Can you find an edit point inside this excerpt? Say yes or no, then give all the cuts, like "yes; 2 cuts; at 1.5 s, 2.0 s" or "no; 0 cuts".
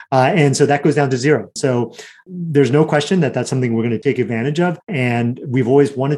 yes; 3 cuts; at 1.5 s, 4.0 s, 4.9 s